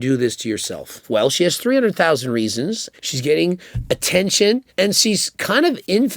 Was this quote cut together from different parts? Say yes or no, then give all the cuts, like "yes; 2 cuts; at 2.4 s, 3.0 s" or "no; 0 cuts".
yes; 2 cuts; at 0.9 s, 2.9 s